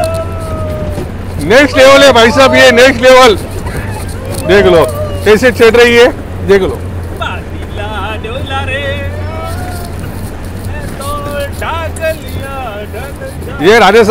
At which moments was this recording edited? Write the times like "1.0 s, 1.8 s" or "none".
none